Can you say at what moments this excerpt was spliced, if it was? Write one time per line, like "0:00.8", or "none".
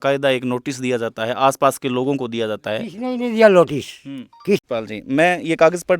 0:04.6

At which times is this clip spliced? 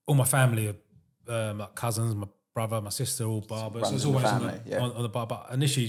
none

